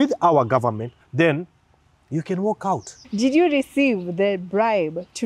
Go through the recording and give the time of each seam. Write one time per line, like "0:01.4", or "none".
0:00.9
0:03.0